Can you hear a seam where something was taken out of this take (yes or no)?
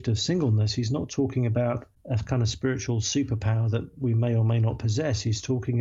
no